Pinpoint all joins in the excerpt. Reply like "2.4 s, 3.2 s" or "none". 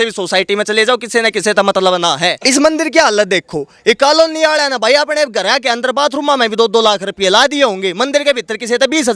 2.4 s